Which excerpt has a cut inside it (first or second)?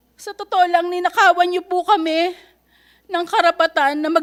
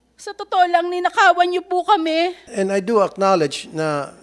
second